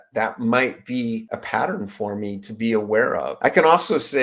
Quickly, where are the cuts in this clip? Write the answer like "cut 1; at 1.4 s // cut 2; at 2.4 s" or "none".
cut 1; at 1.3 s // cut 2; at 3.3 s